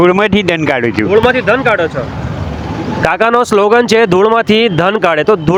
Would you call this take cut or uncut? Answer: uncut